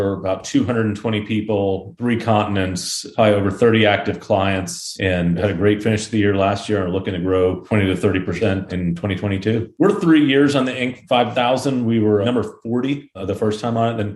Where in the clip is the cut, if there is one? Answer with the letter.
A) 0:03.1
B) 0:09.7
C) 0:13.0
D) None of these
B